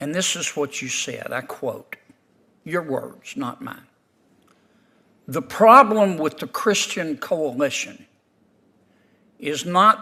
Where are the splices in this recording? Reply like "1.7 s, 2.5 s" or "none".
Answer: none